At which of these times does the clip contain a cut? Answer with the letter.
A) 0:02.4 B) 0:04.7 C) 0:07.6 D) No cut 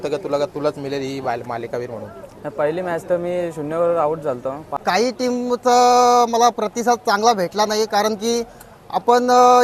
B